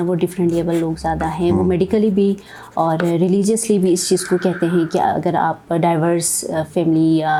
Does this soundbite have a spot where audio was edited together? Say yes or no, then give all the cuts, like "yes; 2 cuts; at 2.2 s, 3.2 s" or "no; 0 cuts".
no; 0 cuts